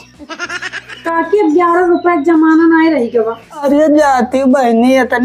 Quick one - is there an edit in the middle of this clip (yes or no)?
yes